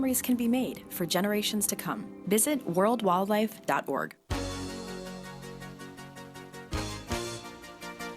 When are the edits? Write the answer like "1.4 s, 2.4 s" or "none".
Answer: 4.2 s